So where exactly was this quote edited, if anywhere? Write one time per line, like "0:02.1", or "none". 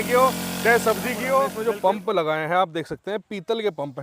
0:01.5